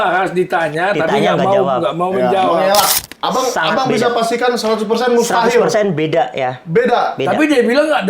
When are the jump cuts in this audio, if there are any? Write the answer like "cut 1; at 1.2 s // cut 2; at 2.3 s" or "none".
cut 1; at 3.0 s